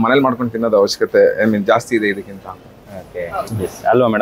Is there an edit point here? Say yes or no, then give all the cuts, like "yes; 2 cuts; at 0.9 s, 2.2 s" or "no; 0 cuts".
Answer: no; 0 cuts